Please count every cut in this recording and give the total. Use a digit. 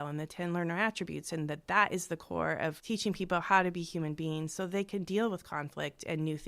1